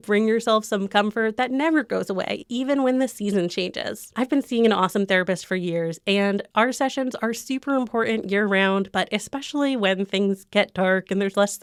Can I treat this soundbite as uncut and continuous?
yes; 0 cuts

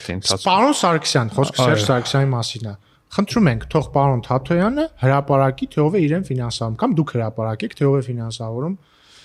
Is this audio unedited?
yes; 0 cuts

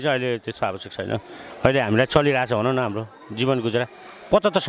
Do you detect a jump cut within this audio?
no; 0 cuts

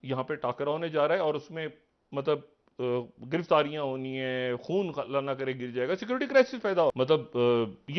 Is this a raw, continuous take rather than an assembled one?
no; 1 cut; at 6.9 s

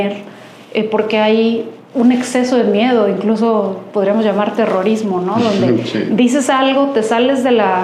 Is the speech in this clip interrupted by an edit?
no; 0 cuts

